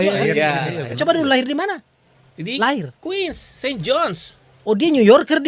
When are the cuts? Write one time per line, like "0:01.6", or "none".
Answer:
none